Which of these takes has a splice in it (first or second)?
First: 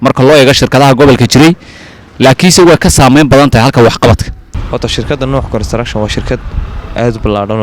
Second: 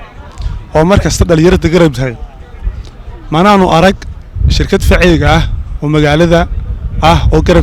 first